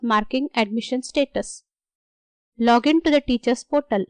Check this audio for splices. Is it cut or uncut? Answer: uncut